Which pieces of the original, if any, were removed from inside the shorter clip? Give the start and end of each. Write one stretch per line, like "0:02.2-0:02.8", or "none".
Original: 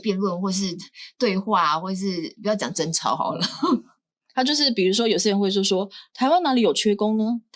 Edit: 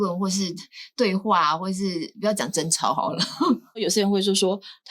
0:04.0-0:05.1